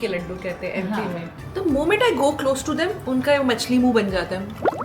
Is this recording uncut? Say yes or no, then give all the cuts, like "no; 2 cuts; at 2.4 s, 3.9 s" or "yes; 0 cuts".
no; 1 cut; at 1.4 s